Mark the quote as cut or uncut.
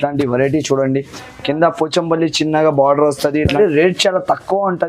cut